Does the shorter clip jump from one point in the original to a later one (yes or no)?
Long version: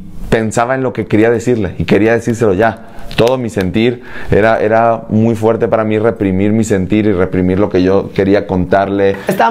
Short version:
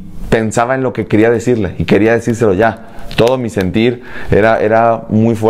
no